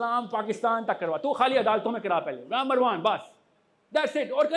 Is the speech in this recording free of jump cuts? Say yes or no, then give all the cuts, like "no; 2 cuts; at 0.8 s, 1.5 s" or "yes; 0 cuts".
yes; 0 cuts